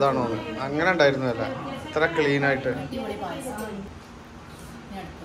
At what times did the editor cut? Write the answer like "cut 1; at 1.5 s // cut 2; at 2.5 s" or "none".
cut 1; at 3.9 s